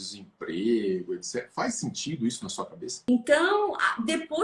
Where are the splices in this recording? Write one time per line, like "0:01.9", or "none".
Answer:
0:03.0